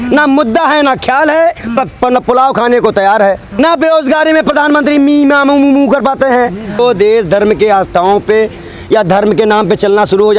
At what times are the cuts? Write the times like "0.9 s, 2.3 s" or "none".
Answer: 3.6 s, 6.8 s